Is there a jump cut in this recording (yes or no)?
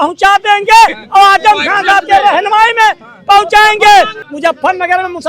yes